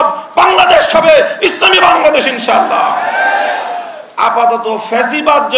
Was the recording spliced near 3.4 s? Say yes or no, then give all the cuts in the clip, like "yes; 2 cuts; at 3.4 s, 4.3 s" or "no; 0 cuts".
no; 0 cuts